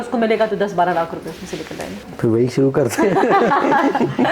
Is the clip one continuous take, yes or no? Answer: no